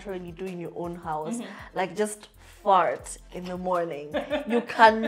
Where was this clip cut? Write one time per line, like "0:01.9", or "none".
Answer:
none

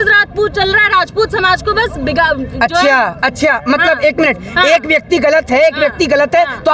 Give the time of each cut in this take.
none

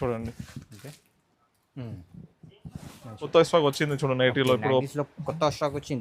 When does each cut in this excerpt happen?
0:03.3

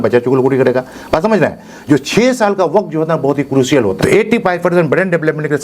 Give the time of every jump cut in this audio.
0:04.0

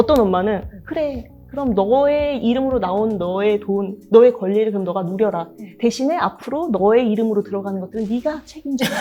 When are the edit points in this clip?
none

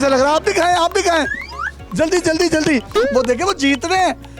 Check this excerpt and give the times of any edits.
0:02.9

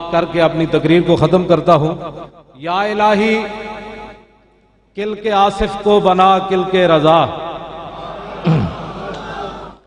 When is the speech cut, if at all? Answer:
none

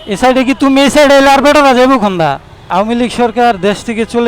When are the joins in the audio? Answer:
0:02.6

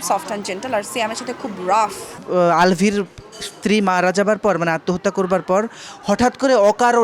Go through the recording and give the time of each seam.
0:02.1

